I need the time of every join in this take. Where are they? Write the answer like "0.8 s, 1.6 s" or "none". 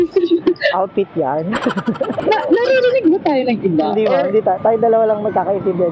none